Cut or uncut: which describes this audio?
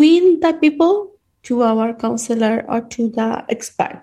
uncut